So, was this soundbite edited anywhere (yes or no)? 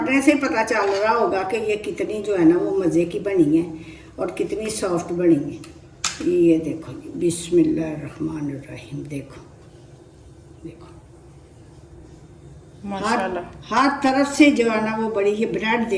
no